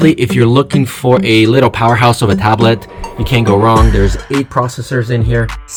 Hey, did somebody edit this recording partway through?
no; 0 cuts

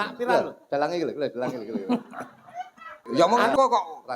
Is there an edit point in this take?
yes; 1 cut; at 3.0 s

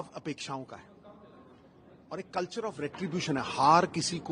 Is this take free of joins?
yes; 0 cuts

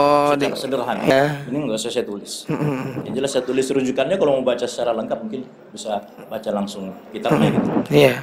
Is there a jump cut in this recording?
yes; 1 cut; at 1.1 s

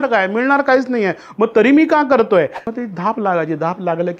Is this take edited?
yes; 1 cut; at 2.6 s

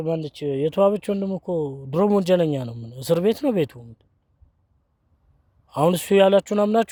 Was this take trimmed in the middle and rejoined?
no; 0 cuts

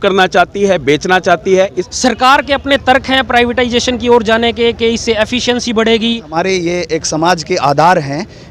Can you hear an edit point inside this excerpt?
yes; 2 cuts; at 1.8 s, 6.3 s

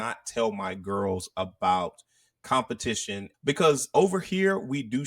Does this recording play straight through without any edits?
no; 1 cut; at 3.3 s

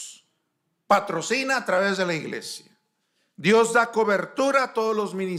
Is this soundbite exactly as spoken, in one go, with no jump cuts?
yes; 0 cuts

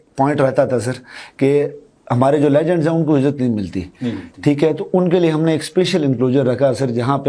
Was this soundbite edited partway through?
no; 0 cuts

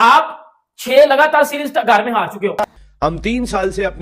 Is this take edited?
yes; 1 cut; at 2.6 s

